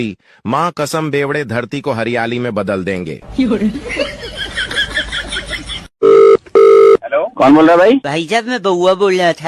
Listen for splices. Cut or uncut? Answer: cut